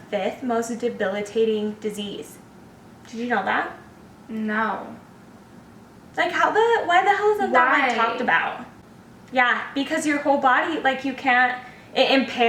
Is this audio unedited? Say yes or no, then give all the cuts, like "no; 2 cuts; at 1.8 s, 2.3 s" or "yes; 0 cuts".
yes; 0 cuts